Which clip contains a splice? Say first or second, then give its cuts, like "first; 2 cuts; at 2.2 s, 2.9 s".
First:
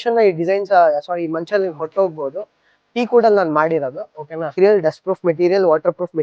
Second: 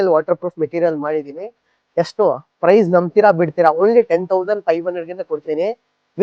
first; 1 cut; at 4.6 s